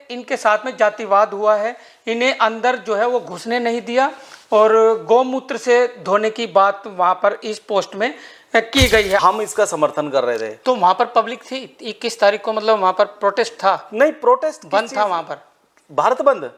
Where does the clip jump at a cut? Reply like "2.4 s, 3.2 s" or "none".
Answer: 9.2 s